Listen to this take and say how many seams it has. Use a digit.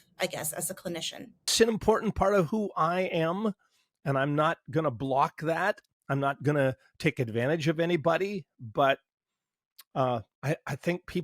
1